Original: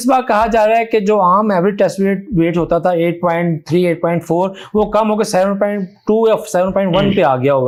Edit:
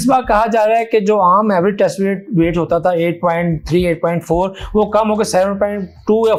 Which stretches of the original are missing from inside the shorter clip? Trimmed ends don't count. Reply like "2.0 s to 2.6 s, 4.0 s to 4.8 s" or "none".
none